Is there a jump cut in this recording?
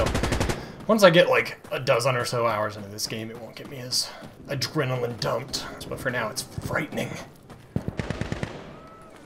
yes; 3 cuts; at 4.3 s, 5.7 s, 7.9 s

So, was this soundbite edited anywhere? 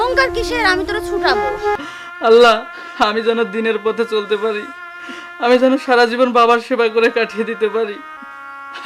yes; 1 cut; at 1.8 s

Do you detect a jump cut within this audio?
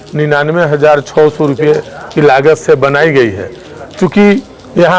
no; 0 cuts

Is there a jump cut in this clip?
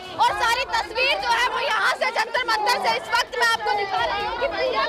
no; 0 cuts

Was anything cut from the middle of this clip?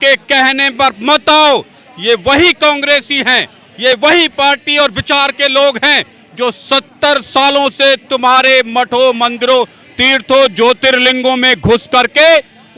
no; 0 cuts

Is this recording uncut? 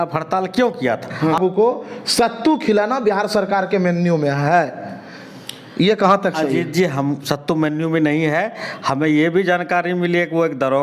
no; 1 cut; at 1.4 s

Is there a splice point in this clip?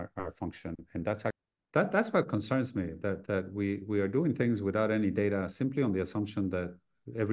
yes; 1 cut; at 1.4 s

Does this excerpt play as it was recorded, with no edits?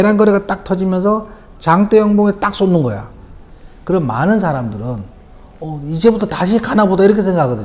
yes; 0 cuts

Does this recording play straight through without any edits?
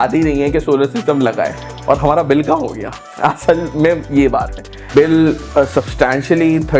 no; 1 cut; at 4.9 s

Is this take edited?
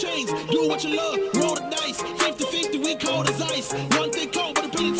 yes; 1 cut; at 2.0 s

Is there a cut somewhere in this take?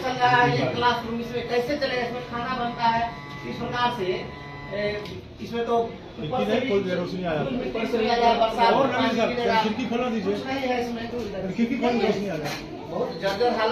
no; 0 cuts

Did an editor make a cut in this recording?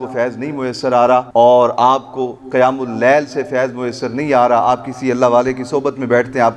yes; 1 cut; at 1.3 s

